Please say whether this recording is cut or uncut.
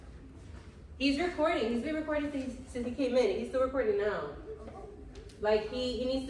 uncut